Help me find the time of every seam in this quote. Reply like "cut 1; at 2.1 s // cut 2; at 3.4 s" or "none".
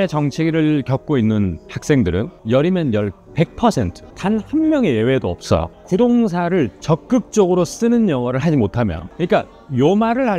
cut 1; at 4.0 s // cut 2; at 9.0 s